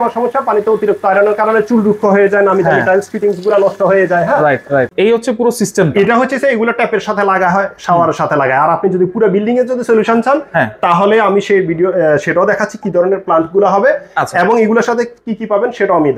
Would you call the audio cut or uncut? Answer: uncut